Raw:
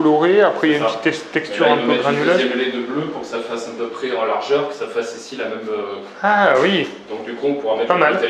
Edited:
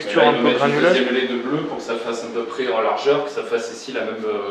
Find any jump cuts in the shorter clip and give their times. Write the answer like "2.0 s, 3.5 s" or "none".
none